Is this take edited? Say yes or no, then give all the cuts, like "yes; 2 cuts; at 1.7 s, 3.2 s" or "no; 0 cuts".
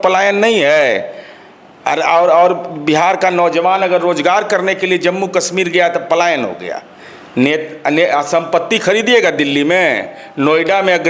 no; 0 cuts